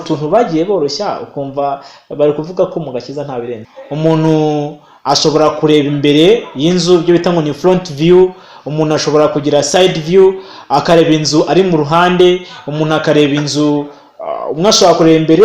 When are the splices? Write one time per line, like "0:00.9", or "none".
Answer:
0:03.5